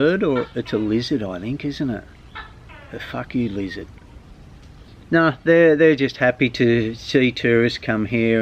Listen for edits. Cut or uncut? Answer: uncut